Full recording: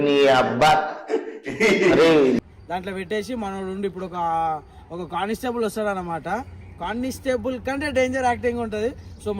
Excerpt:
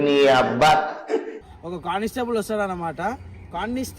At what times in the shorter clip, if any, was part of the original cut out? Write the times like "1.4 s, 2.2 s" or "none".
1.4 s